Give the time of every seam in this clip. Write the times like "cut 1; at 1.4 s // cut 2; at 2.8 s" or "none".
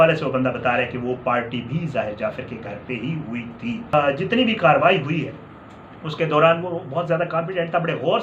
cut 1; at 3.9 s